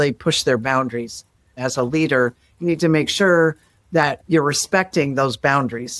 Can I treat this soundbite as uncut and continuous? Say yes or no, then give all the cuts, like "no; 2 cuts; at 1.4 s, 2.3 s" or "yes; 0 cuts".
no; 2 cuts; at 1.6 s, 4.2 s